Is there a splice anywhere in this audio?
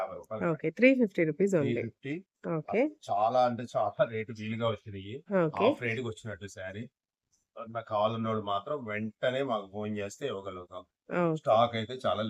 no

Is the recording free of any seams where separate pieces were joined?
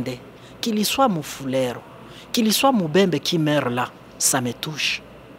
yes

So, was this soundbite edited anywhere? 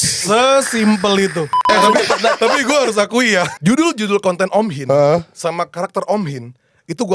yes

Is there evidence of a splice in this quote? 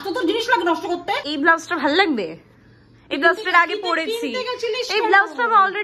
yes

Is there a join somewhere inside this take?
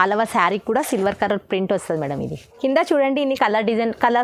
yes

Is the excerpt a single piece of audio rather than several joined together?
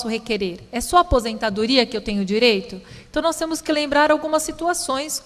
yes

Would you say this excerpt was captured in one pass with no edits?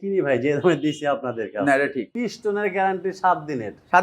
no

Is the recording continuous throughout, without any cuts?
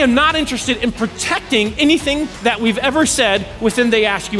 no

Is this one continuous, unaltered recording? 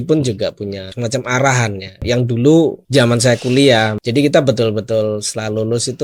no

